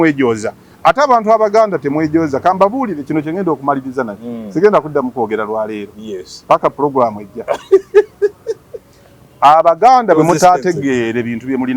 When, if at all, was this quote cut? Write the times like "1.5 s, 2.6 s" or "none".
none